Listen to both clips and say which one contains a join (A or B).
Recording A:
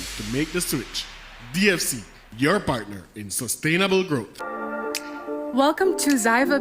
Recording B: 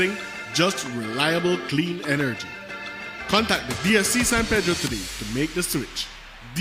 A